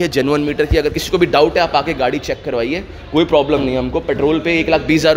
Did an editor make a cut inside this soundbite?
no; 0 cuts

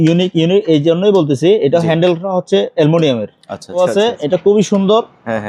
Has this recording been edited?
yes; 1 cut; at 3.8 s

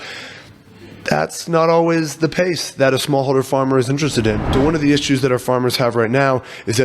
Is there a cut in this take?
yes; 1 cut; at 4.4 s

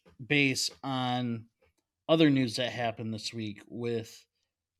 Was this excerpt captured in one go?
yes; 0 cuts

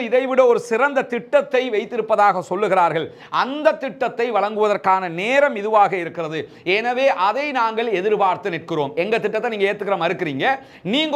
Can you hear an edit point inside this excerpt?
no; 0 cuts

